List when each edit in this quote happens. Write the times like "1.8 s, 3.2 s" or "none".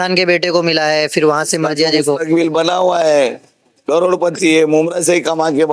none